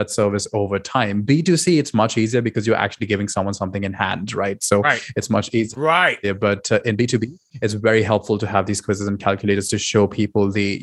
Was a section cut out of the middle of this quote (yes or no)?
no